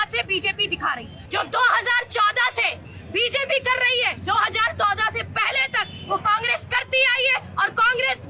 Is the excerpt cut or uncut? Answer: cut